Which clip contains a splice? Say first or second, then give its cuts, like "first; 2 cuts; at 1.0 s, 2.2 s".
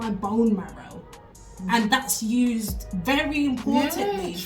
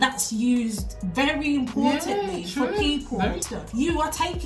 second; 1 cut; at 3.5 s